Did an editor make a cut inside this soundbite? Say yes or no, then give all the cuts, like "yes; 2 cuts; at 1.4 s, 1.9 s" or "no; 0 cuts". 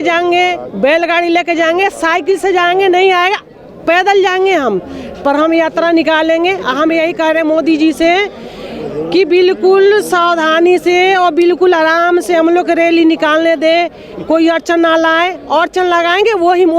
no; 0 cuts